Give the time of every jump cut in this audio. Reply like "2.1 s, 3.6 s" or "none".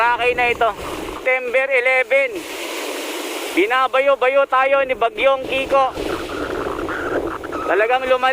1.2 s